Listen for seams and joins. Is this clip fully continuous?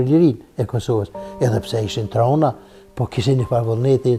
yes; 0 cuts

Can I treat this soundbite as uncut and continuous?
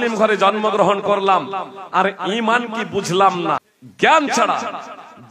no; 1 cut; at 4.2 s

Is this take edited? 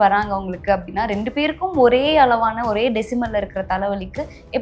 no; 0 cuts

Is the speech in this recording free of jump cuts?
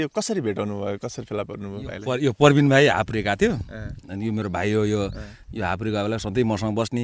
yes; 0 cuts

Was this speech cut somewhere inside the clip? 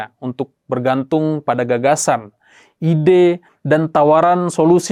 no; 0 cuts

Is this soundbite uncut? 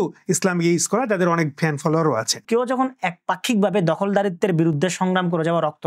no; 1 cut; at 2.4 s

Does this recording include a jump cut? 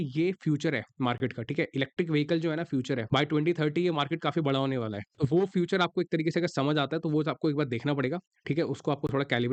no; 0 cuts

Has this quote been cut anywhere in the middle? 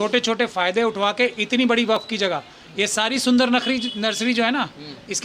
no; 0 cuts

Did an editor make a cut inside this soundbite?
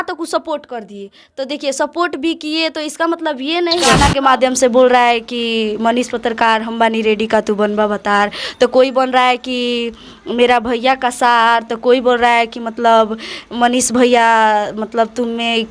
yes; 1 cut; at 3.9 s

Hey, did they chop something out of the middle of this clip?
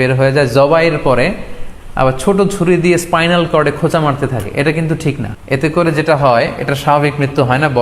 yes; 1 cut; at 5.3 s

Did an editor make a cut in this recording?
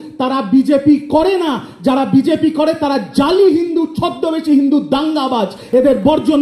no; 0 cuts

